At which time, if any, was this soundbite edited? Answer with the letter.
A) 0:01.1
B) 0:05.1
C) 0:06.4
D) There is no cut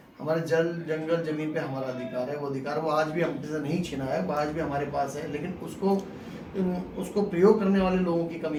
D